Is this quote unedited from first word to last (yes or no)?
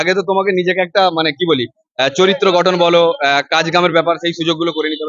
yes